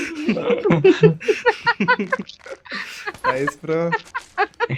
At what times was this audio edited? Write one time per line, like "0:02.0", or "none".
none